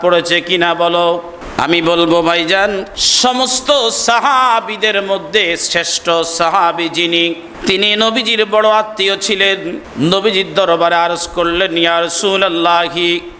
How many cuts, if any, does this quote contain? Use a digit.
4